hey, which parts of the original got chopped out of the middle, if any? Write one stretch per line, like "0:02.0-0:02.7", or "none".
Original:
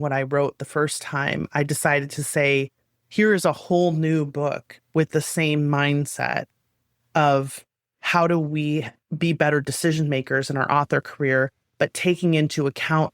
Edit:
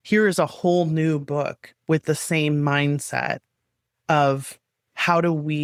none